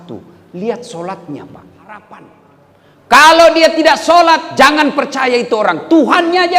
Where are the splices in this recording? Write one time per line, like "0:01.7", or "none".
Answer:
0:02.2